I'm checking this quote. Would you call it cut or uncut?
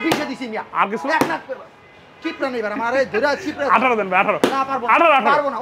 uncut